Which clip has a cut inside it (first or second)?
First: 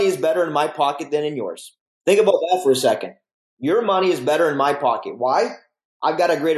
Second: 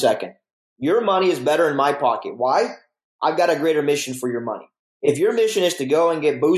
first